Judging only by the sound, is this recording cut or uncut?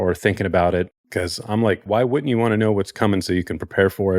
cut